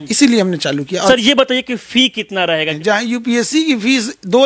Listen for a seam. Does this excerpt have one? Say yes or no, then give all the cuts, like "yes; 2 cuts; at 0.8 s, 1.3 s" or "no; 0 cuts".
yes; 2 cuts; at 1.1 s, 2.7 s